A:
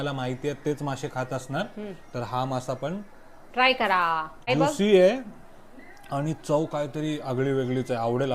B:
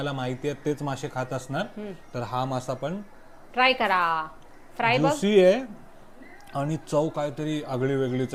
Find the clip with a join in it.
A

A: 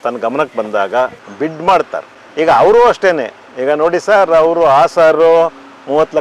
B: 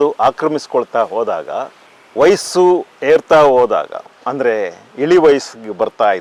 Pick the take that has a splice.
A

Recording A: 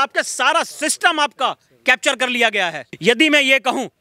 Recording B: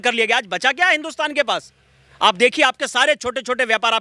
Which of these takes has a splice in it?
A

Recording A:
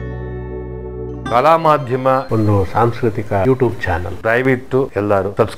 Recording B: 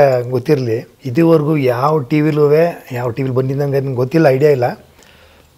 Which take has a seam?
B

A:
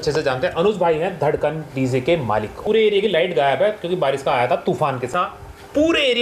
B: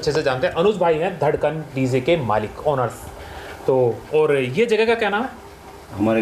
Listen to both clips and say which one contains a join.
A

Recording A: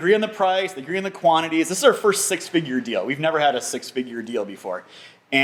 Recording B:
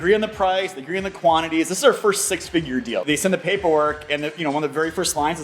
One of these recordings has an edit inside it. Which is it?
B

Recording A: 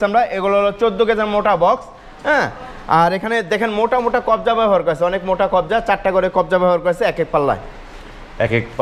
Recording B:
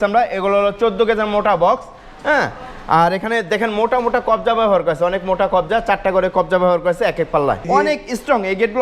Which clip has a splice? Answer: B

